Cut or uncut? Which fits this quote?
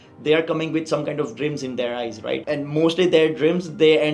cut